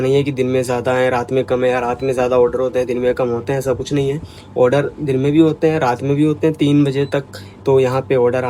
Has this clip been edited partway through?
no; 0 cuts

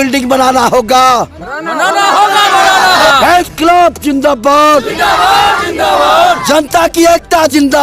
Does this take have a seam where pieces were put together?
no; 0 cuts

